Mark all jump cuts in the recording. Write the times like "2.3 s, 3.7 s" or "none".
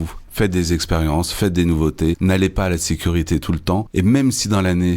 2.2 s, 3.9 s

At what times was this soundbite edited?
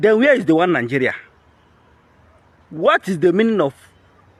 none

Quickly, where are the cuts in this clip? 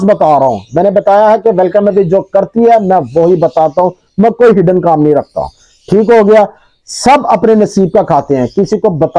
none

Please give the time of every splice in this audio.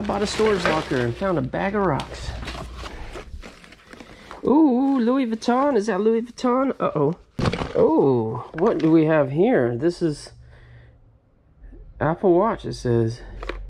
2.8 s, 7.4 s

